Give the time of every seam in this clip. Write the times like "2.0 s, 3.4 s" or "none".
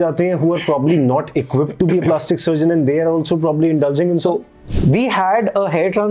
4.6 s